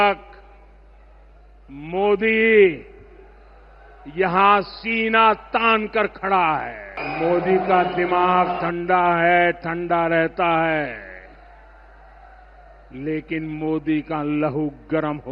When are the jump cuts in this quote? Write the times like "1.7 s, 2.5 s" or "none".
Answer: 7.0 s